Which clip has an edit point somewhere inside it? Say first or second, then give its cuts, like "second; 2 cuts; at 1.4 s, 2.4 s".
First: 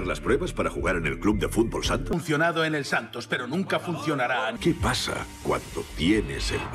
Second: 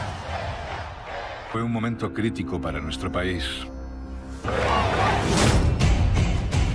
second; 1 cut; at 0.9 s